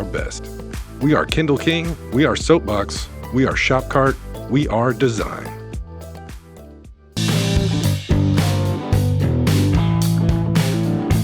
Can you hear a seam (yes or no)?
yes